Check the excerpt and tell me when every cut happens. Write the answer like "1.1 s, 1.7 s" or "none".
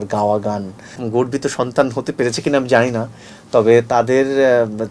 1.0 s